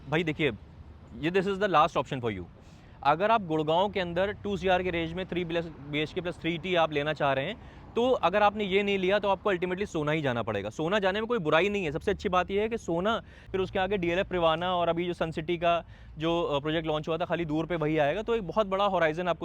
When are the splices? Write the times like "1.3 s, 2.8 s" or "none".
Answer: 13.4 s